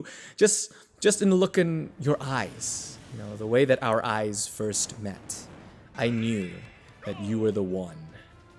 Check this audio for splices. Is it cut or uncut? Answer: uncut